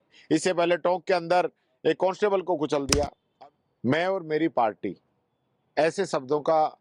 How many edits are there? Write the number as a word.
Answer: one